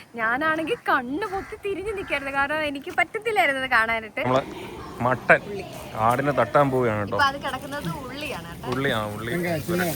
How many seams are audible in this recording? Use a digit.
1